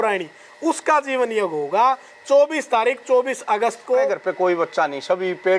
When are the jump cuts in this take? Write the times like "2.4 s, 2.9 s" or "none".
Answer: 4.2 s